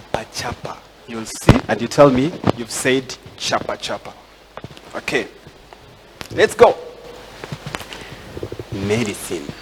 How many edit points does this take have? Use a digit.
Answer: 0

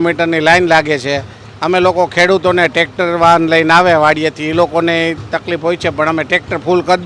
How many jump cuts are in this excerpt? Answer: 0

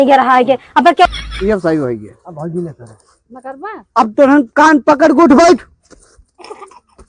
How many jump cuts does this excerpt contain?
1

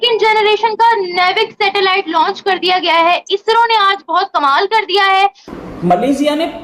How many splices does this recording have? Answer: 1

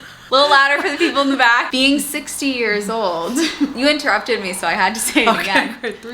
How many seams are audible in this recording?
1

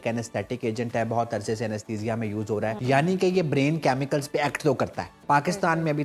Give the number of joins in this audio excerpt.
2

